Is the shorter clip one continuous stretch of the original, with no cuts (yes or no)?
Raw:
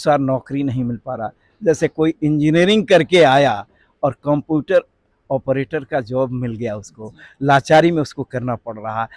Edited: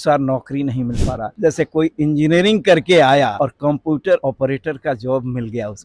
no